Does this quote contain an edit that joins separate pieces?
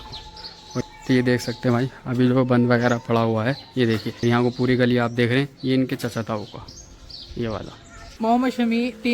yes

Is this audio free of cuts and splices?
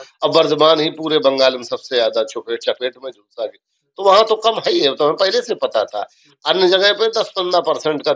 yes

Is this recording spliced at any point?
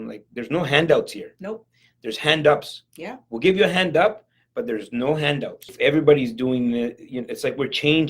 yes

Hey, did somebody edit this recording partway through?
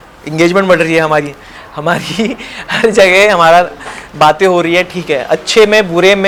no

